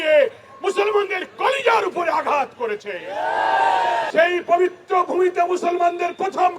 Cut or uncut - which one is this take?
cut